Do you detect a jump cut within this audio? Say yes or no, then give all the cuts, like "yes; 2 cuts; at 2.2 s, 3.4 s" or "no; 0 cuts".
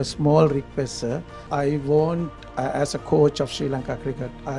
yes; 1 cut; at 1.4 s